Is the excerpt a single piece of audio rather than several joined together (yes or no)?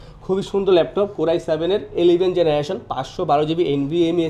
yes